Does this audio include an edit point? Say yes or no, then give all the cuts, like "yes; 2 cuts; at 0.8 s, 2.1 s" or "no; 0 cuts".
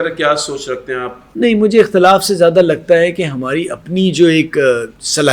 yes; 1 cut; at 1.2 s